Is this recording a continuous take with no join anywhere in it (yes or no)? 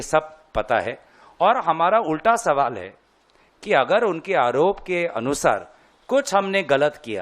yes